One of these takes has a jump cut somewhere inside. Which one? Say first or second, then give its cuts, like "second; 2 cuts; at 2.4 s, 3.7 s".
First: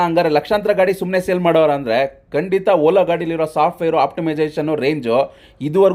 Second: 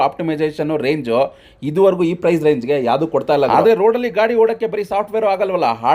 second; 1 cut; at 3.5 s